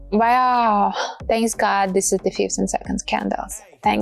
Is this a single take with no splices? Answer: no; 1 cut; at 1.1 s

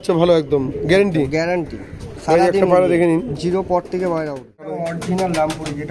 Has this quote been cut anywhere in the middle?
yes; 1 cut; at 4.7 s

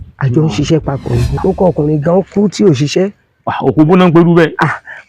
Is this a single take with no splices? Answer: no; 1 cut; at 1.4 s

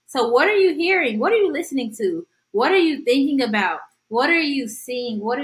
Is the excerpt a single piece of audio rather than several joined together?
yes; 0 cuts

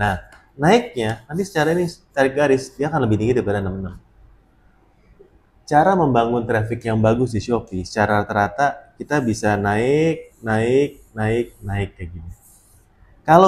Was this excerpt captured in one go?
yes; 0 cuts

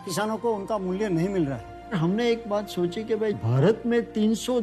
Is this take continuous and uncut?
no; 1 cut; at 1.7 s

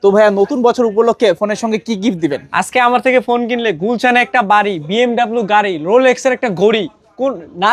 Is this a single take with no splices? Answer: yes; 0 cuts

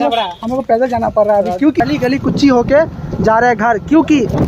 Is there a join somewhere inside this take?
yes; 1 cut; at 1.8 s

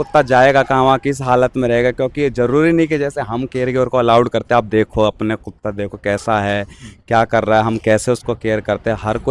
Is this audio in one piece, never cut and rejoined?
yes; 0 cuts

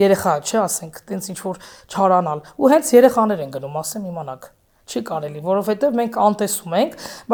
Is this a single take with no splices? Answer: yes; 0 cuts

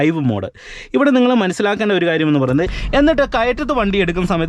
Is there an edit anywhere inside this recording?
yes; 1 cut; at 2.7 s

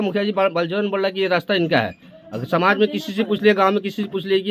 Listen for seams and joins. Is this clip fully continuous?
yes; 0 cuts

